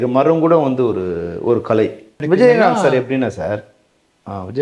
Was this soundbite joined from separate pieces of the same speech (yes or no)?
yes